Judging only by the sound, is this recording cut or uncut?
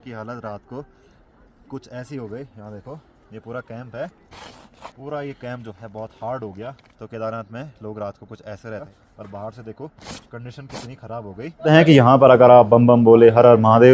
cut